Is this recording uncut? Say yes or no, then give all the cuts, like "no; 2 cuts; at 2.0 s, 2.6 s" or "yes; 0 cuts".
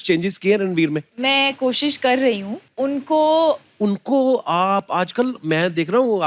no; 3 cuts; at 1.1 s, 2.6 s, 3.7 s